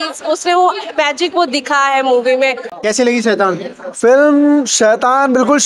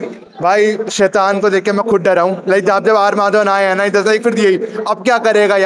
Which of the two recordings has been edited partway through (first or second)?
first